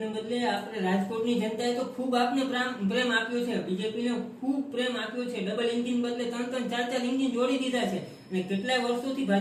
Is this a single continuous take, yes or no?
yes